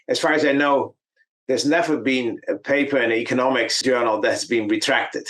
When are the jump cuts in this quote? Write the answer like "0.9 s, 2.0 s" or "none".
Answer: 3.7 s